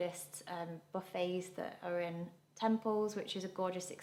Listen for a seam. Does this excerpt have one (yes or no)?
no